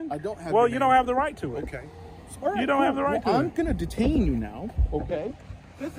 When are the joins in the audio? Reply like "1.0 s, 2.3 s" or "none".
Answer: none